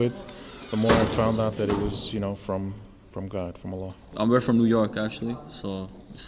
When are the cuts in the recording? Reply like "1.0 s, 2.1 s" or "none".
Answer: 4.0 s